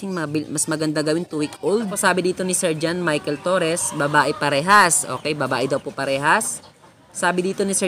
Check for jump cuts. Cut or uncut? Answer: cut